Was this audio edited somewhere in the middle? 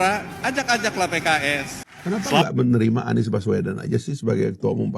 yes; 1 cut; at 1.8 s

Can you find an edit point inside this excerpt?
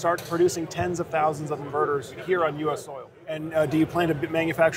yes; 1 cut; at 3.4 s

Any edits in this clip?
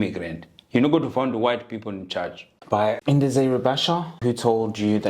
yes; 2 cuts; at 2.9 s, 4.1 s

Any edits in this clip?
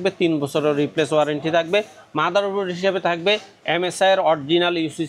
no; 0 cuts

